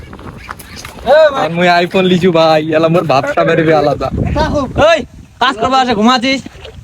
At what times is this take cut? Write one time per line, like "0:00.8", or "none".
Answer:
0:01.4
0:04.2